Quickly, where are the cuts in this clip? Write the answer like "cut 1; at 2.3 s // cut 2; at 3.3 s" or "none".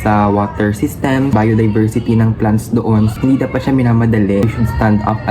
cut 1; at 1.3 s // cut 2; at 3.1 s // cut 3; at 4.5 s